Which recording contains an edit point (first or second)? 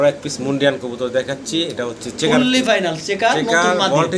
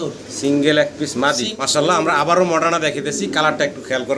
second